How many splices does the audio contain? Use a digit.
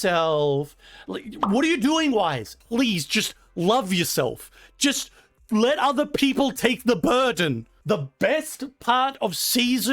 2